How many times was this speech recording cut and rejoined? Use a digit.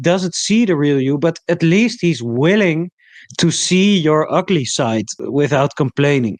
1